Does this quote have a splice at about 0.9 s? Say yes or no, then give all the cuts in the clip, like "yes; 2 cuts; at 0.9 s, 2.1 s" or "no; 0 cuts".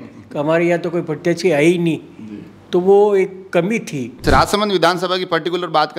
no; 1 cut; at 4.2 s